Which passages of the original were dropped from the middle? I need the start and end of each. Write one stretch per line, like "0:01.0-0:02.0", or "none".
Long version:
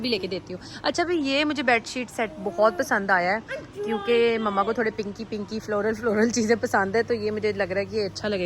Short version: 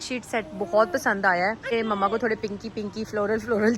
0:03.6-0:04.3